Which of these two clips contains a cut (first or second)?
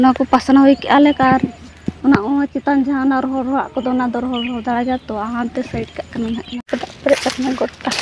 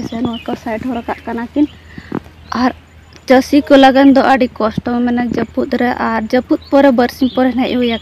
first